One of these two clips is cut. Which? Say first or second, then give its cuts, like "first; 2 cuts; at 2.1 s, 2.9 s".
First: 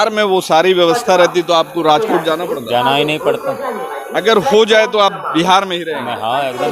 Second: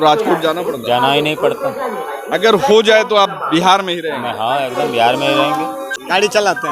second; 1 cut; at 5.8 s